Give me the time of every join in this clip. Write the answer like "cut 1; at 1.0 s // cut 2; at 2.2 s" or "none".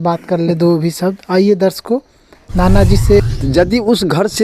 cut 1; at 3.3 s